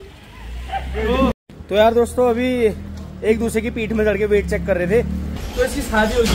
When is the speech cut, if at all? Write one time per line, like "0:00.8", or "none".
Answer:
0:01.3
0:05.3

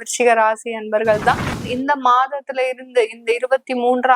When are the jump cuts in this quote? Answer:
0:01.7

